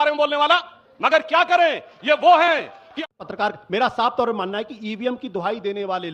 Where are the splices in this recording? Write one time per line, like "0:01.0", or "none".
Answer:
0:02.9